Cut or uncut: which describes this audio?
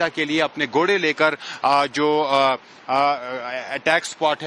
cut